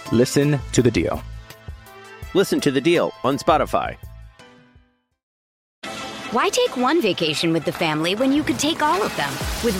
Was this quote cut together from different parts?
yes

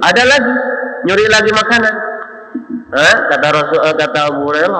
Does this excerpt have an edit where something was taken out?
no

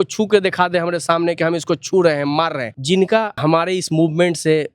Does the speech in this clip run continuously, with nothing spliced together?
no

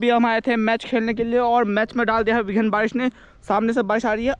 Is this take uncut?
yes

